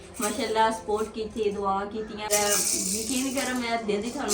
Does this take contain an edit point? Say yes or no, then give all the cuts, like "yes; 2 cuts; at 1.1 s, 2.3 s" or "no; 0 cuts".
yes; 1 cut; at 2.3 s